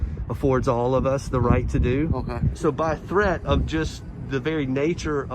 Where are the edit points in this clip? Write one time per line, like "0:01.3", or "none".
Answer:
0:02.5

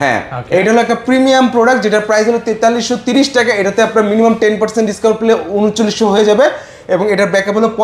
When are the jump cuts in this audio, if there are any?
none

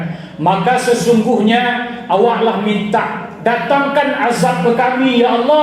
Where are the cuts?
none

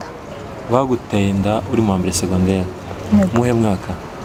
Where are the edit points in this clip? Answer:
none

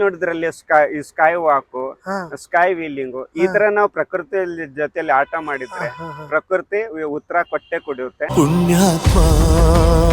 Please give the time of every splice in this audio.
0:08.3

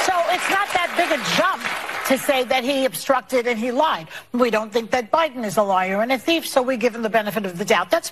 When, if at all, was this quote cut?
none

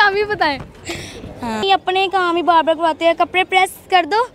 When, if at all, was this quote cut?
0:01.6

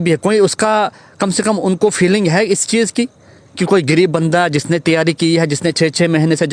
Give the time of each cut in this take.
none

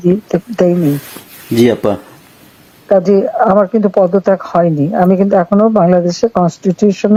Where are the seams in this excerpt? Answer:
none

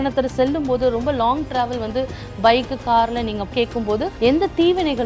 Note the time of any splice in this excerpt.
0:03.5

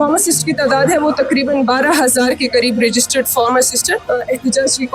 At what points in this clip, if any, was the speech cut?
0:04.0

